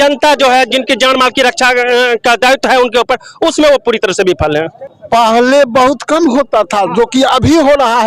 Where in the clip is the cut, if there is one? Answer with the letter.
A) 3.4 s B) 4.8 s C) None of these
B